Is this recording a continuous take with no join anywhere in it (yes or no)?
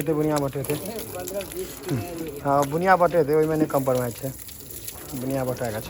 yes